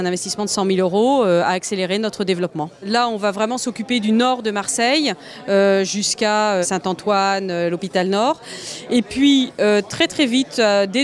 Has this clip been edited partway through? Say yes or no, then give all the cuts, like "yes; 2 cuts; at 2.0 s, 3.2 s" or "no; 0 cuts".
yes; 1 cut; at 6.7 s